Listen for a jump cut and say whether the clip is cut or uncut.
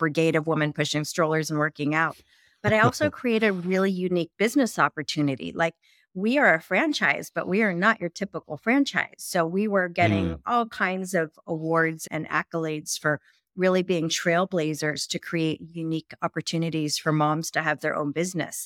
uncut